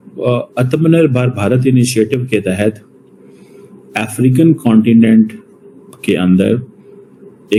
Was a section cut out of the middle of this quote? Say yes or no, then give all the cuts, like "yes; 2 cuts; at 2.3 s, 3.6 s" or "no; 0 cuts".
no; 0 cuts